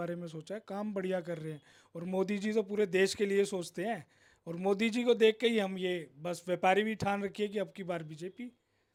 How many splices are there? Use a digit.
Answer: 0